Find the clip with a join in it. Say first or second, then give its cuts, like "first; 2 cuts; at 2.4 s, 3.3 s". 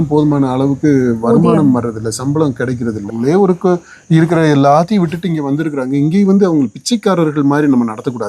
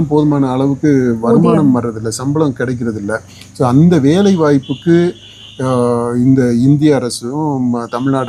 first; 1 cut; at 3.1 s